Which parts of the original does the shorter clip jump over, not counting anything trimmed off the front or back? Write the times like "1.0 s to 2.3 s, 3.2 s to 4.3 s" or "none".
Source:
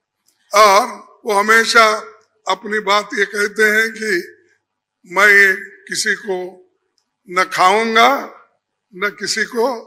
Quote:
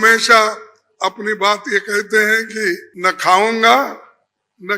4.3 s to 7.2 s